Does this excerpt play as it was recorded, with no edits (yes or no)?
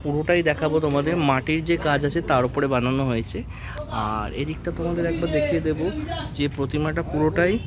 yes